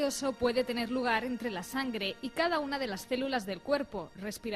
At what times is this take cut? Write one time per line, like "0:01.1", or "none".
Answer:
none

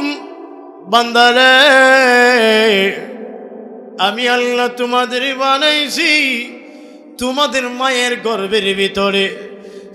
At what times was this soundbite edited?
none

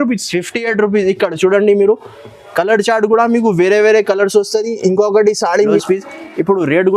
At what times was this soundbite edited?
0:05.5

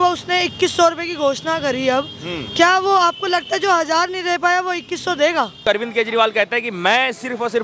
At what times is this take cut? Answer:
0:05.6

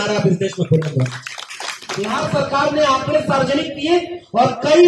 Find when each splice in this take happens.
0:02.1

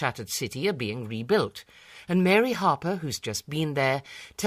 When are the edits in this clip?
0:03.2

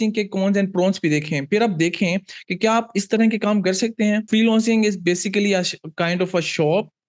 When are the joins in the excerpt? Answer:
0:04.3

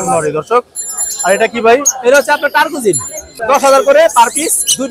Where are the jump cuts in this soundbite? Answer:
0:03.4

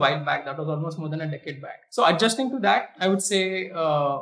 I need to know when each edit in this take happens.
0:01.7
0:02.9

